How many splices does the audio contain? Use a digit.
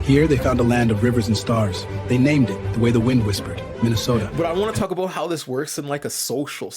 1